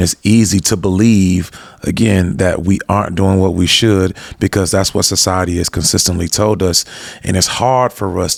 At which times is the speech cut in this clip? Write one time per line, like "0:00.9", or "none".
none